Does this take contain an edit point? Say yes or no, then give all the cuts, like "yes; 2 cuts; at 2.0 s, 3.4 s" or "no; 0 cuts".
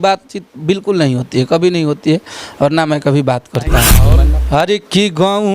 yes; 1 cut; at 4.0 s